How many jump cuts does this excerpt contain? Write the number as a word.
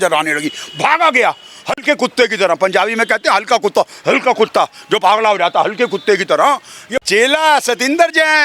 one